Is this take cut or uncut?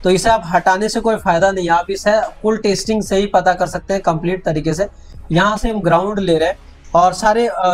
uncut